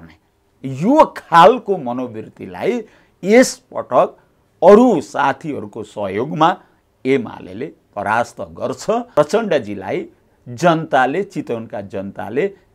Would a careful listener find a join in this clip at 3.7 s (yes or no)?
no